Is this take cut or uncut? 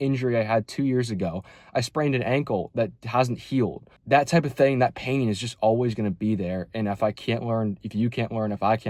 cut